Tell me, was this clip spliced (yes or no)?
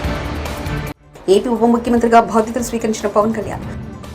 yes